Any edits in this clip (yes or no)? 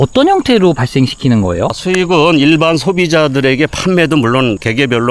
no